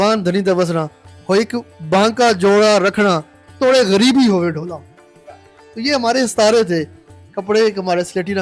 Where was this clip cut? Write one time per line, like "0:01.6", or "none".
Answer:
none